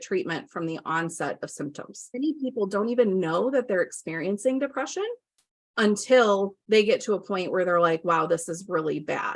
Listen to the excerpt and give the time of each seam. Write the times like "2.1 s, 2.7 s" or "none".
2.0 s, 6.6 s